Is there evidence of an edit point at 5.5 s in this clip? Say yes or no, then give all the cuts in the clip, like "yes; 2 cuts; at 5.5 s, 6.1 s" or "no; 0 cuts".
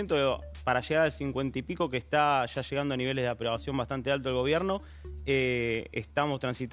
no; 0 cuts